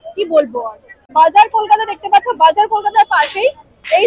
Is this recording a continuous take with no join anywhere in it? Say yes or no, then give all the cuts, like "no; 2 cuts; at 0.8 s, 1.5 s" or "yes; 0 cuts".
yes; 0 cuts